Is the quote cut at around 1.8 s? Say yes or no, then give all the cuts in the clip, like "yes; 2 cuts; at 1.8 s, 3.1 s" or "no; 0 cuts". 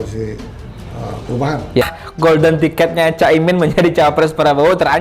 yes; 1 cut; at 1.8 s